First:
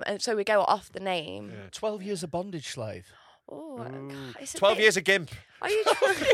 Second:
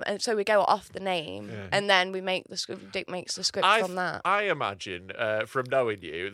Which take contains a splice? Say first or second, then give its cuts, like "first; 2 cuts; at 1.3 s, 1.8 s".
first; 1 cut; at 1.6 s